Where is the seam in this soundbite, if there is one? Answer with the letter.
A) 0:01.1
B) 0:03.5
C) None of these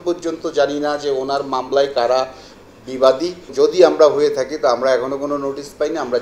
B